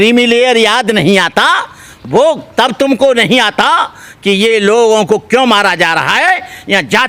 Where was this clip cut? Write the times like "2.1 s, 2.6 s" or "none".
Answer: none